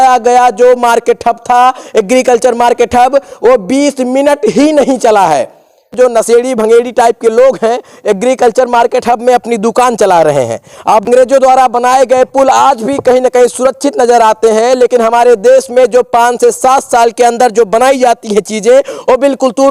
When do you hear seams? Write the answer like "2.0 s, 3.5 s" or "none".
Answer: 5.9 s, 11.1 s

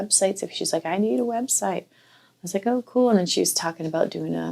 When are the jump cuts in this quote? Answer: none

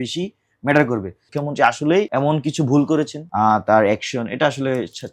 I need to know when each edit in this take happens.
1.2 s, 2.1 s, 3.2 s

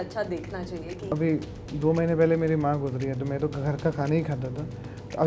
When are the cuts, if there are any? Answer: 1.1 s

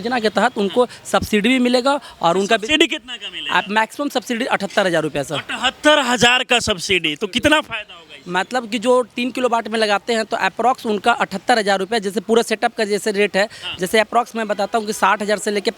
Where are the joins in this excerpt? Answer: none

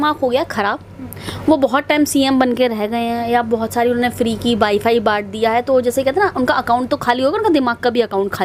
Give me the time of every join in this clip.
none

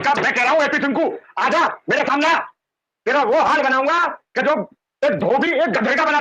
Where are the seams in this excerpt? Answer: none

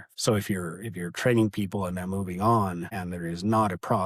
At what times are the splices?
none

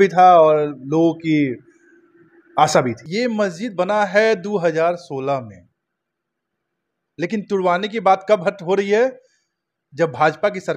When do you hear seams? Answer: 3.0 s

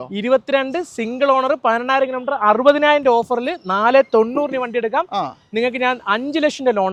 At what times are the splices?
none

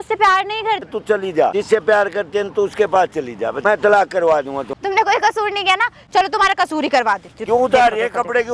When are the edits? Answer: 1.1 s, 3.6 s, 4.7 s, 7.3 s

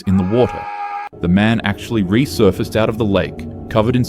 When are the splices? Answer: 1.0 s

